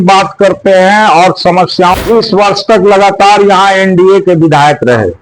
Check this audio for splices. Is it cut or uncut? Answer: cut